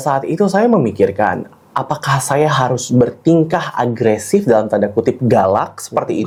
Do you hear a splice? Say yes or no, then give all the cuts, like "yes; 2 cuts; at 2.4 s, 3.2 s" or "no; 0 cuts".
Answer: no; 0 cuts